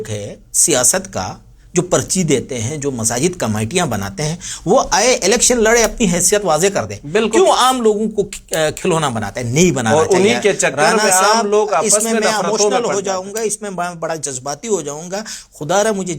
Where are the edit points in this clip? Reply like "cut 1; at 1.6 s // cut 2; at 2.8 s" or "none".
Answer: none